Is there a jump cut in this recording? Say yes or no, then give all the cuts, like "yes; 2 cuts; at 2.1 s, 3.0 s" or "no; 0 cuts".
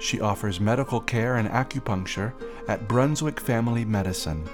no; 0 cuts